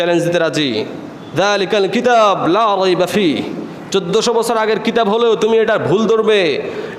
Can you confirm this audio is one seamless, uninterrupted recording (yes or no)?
yes